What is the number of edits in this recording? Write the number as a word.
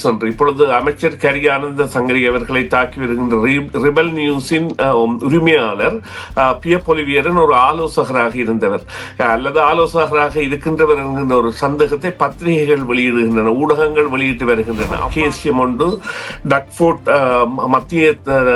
one